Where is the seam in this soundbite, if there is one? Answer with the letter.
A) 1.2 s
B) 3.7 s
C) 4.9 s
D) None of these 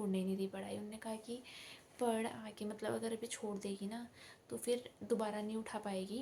D